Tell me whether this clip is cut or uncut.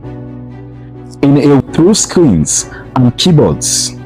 cut